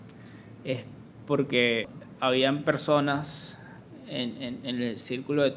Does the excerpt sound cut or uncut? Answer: cut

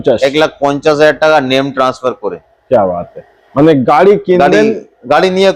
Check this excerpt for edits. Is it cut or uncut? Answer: uncut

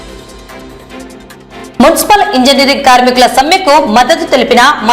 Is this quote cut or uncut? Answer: cut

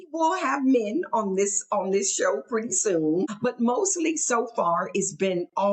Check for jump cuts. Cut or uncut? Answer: cut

